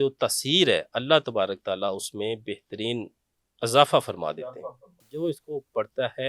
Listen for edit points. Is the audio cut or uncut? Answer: cut